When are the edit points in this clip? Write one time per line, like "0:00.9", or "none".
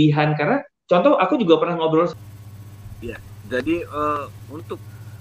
0:02.2